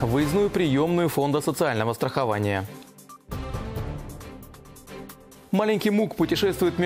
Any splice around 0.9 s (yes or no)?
no